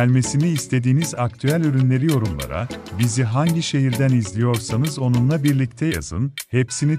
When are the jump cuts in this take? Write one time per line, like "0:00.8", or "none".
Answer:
none